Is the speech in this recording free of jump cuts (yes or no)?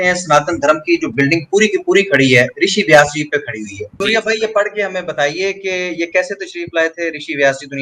no